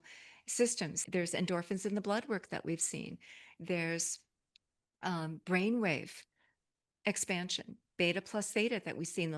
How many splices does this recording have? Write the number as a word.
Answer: one